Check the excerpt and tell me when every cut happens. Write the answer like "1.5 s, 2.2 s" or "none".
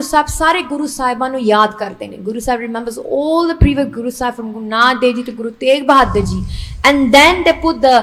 none